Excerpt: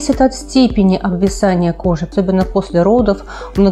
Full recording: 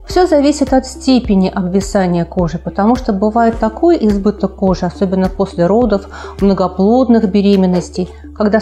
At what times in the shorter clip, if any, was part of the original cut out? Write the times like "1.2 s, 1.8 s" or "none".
2.1 s